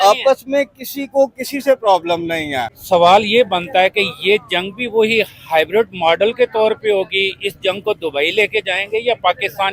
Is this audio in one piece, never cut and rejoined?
no; 1 cut; at 2.7 s

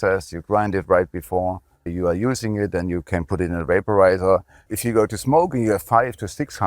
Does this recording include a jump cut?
yes; 2 cuts; at 1.9 s, 4.7 s

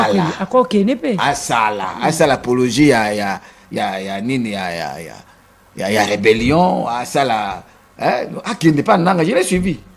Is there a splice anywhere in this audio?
no; 0 cuts

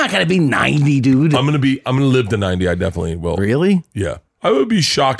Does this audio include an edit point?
yes; 2 cuts; at 3.4 s, 4.3 s

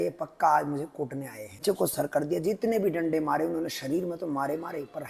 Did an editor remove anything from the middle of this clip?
yes; 1 cut; at 1.6 s

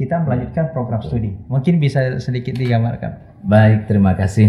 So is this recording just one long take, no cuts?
yes; 0 cuts

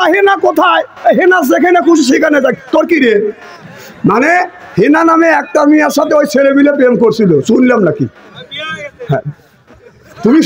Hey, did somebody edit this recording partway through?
no; 0 cuts

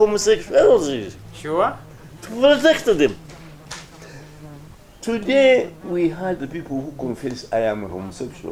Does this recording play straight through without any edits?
yes; 0 cuts

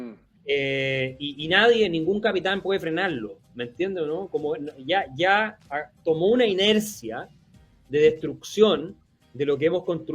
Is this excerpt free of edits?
yes; 0 cuts

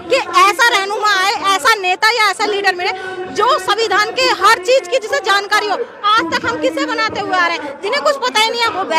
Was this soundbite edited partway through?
no; 0 cuts

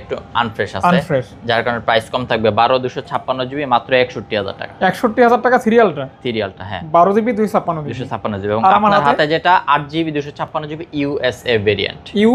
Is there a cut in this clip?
no; 0 cuts

